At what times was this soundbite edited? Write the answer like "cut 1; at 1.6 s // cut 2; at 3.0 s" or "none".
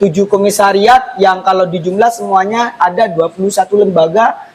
none